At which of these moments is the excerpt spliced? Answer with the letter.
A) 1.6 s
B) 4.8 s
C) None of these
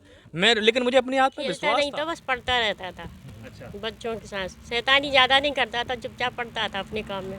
A